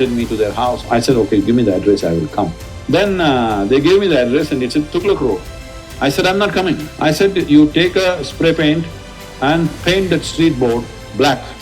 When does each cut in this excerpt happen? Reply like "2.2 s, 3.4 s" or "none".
0.8 s, 2.7 s, 6.9 s